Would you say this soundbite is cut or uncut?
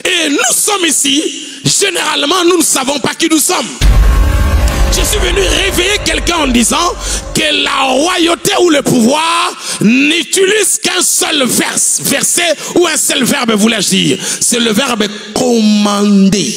uncut